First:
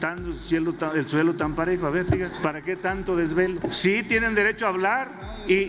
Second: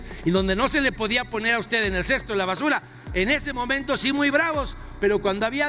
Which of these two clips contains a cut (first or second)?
first